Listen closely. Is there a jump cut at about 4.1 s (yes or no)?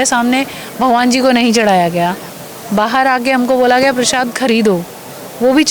no